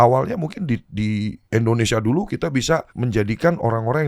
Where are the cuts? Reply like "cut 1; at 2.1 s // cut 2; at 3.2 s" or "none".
cut 1; at 1.4 s // cut 2; at 2.9 s